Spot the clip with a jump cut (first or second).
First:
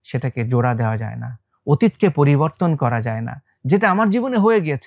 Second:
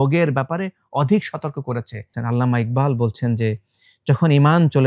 second